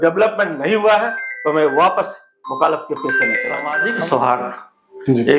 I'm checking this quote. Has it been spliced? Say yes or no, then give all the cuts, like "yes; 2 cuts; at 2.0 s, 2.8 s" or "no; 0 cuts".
yes; 1 cut; at 3.8 s